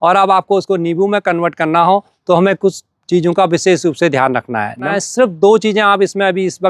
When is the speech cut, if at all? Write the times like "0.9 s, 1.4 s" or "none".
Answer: 4.8 s